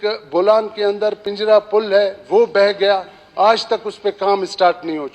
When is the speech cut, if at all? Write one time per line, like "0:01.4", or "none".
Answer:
0:01.2